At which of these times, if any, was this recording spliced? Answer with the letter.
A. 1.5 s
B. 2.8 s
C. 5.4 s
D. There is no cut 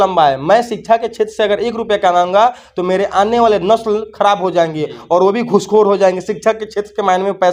D